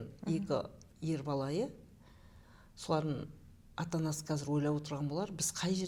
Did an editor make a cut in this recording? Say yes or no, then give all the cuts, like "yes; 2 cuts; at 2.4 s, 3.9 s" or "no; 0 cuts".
no; 0 cuts